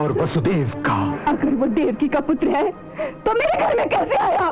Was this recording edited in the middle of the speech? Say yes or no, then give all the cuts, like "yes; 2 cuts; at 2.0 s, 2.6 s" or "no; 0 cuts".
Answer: yes; 1 cut; at 1.1 s